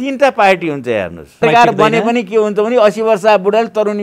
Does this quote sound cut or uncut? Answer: cut